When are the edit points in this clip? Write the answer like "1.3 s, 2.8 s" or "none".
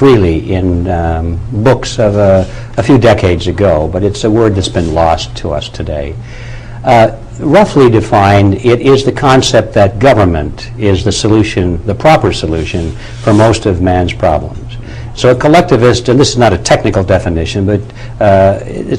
10.2 s